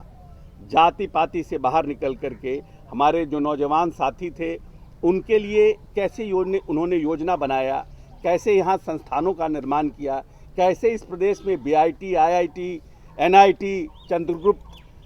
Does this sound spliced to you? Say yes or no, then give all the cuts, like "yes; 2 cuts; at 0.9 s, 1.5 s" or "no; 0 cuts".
no; 0 cuts